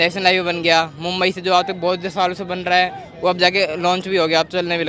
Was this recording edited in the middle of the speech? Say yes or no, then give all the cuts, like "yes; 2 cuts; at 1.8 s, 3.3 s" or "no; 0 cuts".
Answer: no; 0 cuts